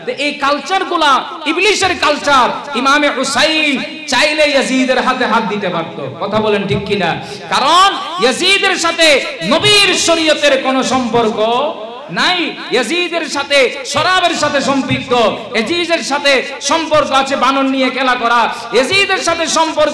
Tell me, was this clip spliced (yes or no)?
no